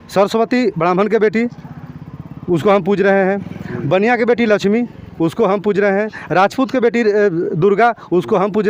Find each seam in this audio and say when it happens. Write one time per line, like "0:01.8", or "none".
none